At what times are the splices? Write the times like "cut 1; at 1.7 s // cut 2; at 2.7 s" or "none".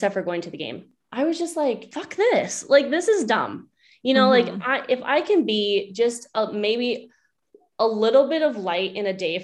cut 1; at 1.0 s // cut 2; at 2.0 s